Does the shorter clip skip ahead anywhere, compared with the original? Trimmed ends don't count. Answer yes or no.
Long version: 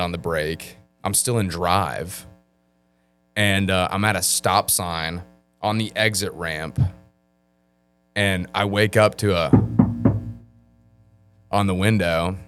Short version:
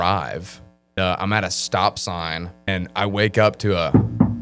yes